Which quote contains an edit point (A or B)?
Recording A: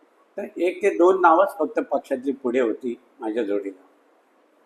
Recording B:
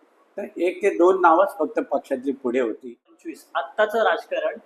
B